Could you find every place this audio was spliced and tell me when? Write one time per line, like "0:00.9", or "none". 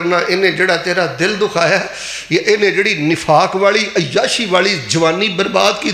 none